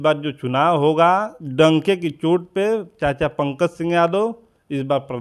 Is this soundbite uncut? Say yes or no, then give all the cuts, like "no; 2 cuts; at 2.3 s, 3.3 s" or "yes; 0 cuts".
no; 1 cut; at 1.4 s